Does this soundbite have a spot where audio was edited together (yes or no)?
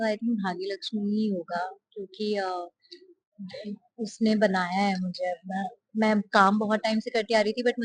no